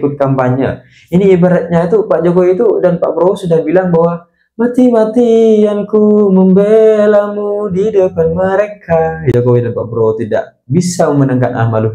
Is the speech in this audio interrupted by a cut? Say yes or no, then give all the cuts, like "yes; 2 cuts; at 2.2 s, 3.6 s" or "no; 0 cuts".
yes; 1 cut; at 9.3 s